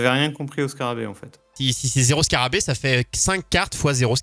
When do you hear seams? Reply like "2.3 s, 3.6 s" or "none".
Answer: 1.5 s